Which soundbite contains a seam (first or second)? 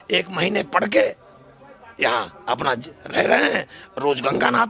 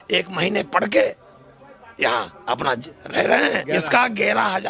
second